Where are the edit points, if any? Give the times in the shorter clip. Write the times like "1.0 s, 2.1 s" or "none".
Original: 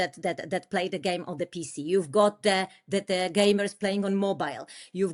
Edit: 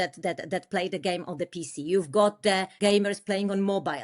2.7 s